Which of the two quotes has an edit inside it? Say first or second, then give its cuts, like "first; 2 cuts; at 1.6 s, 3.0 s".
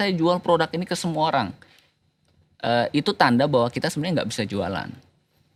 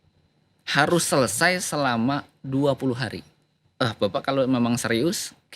second; 1 cut; at 3.6 s